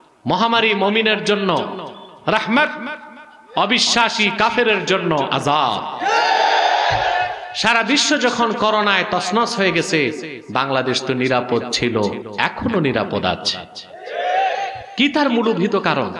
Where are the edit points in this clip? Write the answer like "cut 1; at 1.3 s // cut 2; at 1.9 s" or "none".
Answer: cut 1; at 7.5 s // cut 2; at 12.3 s // cut 3; at 14.8 s